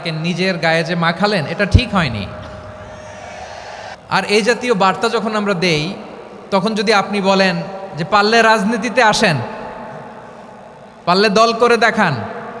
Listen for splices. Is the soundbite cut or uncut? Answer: cut